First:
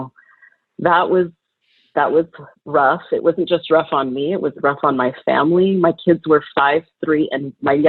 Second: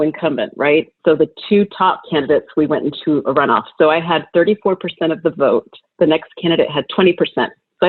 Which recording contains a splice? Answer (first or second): second